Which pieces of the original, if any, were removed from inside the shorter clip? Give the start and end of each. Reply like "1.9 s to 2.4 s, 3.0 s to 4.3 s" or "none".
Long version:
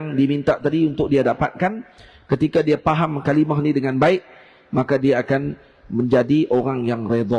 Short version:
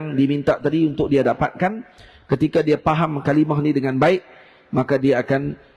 none